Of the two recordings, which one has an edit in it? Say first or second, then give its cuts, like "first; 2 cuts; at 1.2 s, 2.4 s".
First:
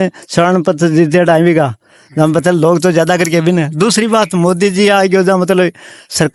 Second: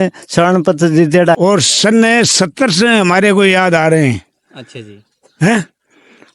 second; 1 cut; at 1.3 s